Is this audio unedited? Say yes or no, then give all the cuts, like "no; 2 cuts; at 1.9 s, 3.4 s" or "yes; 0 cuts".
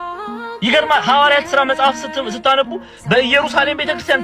yes; 0 cuts